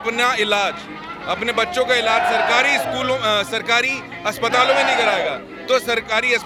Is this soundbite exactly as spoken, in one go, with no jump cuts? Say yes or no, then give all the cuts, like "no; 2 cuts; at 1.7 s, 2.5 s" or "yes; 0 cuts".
yes; 0 cuts